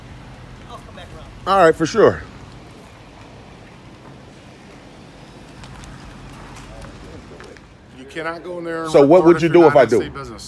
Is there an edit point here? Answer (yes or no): yes